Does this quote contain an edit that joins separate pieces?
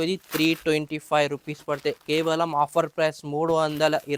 no; 0 cuts

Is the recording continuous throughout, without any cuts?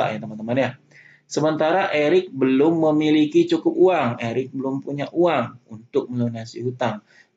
yes; 0 cuts

